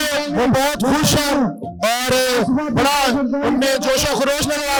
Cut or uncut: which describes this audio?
uncut